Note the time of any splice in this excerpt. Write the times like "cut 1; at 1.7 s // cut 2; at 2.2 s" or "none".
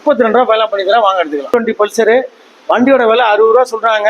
cut 1; at 1.5 s